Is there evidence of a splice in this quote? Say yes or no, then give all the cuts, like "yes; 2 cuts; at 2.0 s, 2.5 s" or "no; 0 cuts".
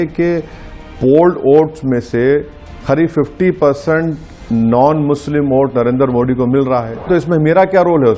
yes; 1 cut; at 7.1 s